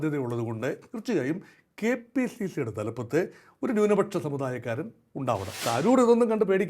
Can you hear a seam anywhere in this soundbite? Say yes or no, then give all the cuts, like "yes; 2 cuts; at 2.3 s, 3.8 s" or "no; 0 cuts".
yes; 1 cut; at 5.6 s